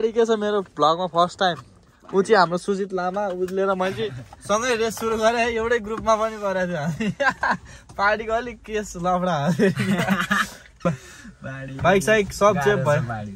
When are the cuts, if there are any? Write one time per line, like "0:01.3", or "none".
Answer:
0:10.9

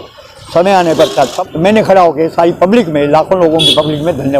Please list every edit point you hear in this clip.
0:01.4

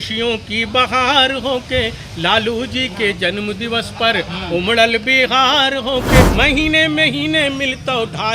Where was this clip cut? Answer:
0:06.2

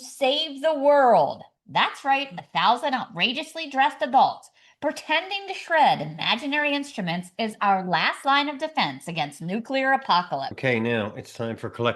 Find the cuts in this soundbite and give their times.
0:10.5

